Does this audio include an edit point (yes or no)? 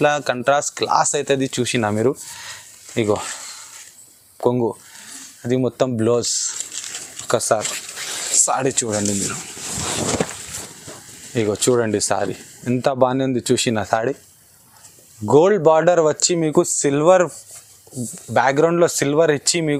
no